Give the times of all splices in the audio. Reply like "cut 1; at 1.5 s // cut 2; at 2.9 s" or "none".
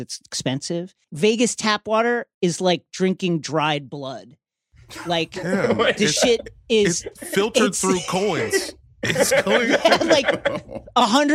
cut 1; at 1.0 s // cut 2; at 2.3 s